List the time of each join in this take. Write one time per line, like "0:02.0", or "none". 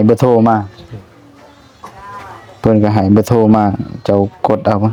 none